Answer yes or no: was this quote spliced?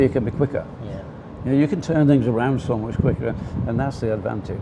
no